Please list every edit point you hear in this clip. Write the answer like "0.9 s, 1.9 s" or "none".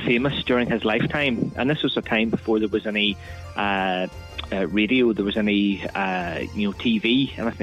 none